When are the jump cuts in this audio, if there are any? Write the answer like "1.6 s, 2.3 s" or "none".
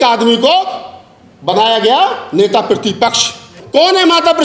3.5 s